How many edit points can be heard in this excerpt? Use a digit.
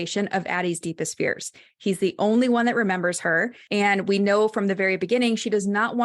1